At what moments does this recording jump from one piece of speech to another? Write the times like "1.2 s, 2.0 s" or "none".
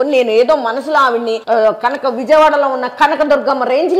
1.4 s